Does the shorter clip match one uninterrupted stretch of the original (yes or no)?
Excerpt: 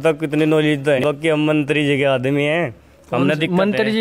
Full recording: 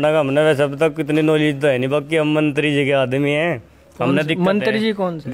no